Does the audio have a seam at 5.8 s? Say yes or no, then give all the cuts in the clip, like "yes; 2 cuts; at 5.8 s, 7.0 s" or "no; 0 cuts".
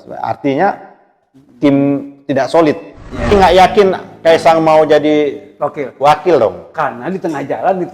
no; 1 cut; at 3.3 s